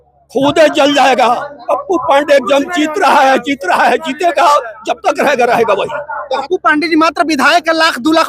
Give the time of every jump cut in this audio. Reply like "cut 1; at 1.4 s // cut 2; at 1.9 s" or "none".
cut 1; at 1.6 s // cut 2; at 6.4 s